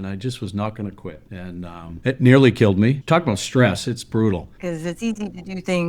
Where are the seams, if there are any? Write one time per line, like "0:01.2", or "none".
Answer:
0:04.5